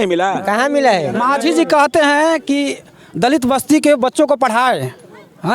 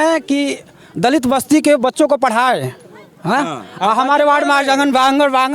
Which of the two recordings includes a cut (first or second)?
first